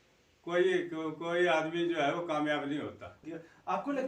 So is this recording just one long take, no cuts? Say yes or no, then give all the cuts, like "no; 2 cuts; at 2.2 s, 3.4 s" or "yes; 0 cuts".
no; 1 cut; at 3.1 s